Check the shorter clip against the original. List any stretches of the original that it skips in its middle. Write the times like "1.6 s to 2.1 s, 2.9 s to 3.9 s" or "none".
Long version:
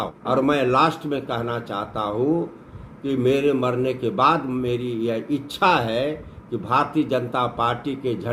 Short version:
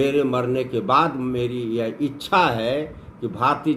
none